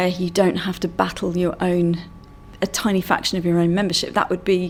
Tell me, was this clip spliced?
no; 0 cuts

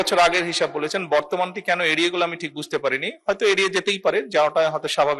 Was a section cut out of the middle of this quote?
no; 0 cuts

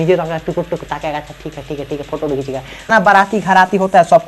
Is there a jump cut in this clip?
yes; 1 cut; at 2.9 s

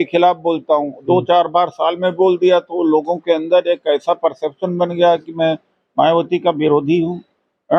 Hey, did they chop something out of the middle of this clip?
no; 0 cuts

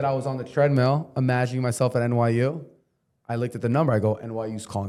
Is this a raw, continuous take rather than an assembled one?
yes; 0 cuts

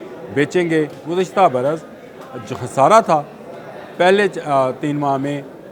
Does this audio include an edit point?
yes; 1 cut; at 1.0 s

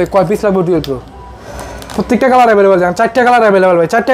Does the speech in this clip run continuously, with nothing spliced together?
yes; 0 cuts

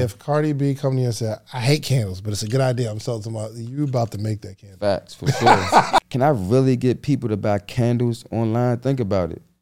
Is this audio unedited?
no; 1 cut; at 6.0 s

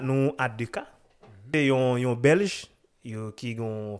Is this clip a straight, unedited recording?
no; 1 cut; at 1.5 s

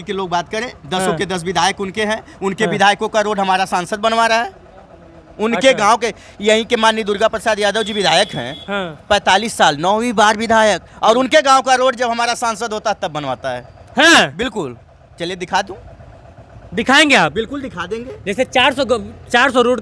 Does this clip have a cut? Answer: no; 0 cuts

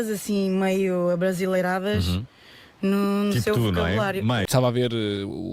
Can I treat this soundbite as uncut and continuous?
no; 1 cut; at 4.5 s

